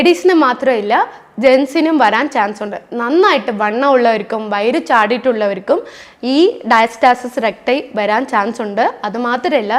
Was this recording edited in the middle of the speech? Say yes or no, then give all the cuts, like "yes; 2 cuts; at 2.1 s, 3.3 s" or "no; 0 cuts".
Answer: no; 0 cuts